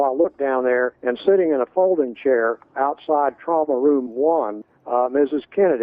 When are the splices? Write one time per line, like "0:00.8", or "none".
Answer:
0:01.0
0:02.6
0:04.6